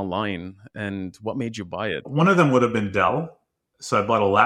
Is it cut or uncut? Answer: cut